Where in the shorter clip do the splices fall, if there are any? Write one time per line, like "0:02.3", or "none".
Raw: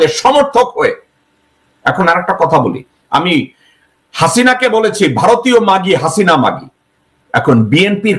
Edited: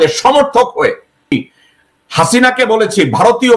0:01.3